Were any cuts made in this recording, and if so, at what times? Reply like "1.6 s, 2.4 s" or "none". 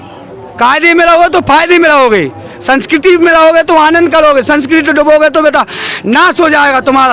none